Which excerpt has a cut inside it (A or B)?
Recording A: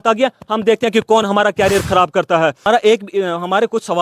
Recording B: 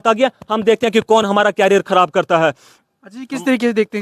A